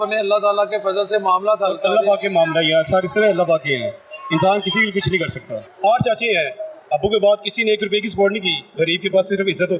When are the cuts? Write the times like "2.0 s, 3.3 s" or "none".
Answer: 5.6 s, 8.6 s

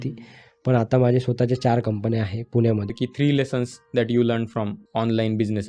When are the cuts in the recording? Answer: 2.9 s, 4.8 s

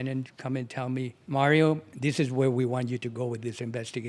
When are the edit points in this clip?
1.2 s, 1.9 s

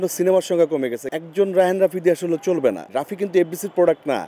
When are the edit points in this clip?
1.0 s, 3.0 s

